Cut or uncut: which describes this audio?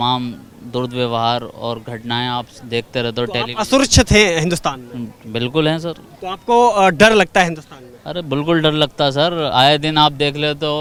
uncut